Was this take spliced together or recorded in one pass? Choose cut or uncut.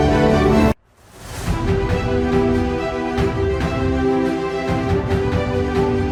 uncut